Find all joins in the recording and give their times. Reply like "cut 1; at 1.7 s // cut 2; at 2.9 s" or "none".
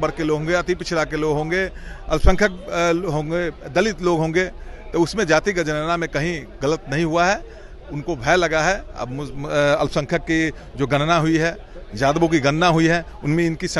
none